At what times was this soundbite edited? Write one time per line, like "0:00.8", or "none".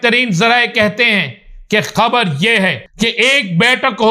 0:02.8